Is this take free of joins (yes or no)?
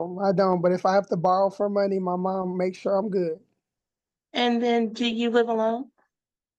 yes